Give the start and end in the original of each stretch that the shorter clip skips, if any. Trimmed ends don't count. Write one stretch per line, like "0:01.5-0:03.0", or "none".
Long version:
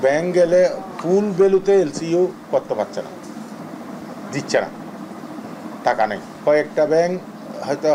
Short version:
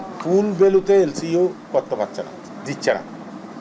0:03.3-0:04.1

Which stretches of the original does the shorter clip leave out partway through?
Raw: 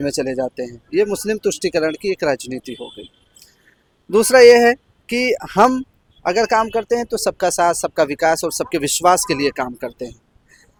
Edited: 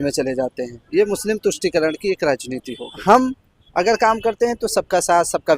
0:03.0-0:05.5

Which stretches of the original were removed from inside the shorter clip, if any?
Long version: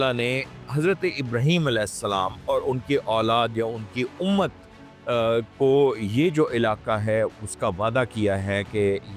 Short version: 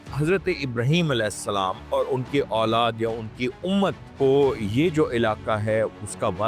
0:04.7-0:05.5

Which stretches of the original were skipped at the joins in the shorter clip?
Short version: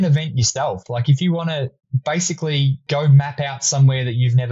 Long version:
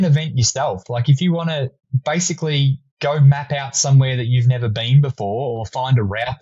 0:02.8-0:02.9

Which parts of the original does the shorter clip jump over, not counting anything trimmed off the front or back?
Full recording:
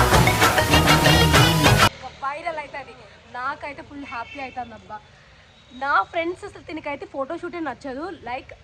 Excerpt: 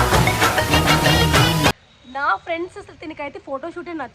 0:01.7-0:05.4

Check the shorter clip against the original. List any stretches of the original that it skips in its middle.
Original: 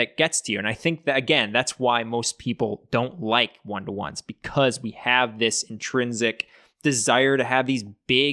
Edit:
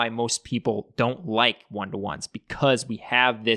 none

